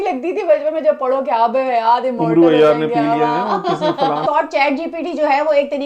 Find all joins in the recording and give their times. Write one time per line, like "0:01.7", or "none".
0:04.2